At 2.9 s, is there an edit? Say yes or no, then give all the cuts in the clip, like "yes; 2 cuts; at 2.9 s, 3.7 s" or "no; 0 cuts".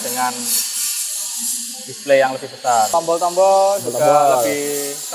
yes; 1 cut; at 2.9 s